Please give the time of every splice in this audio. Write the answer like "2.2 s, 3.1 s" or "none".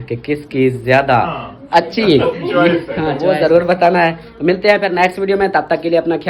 3.2 s